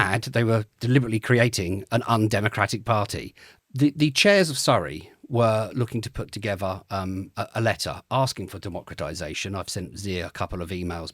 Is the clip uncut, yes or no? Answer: yes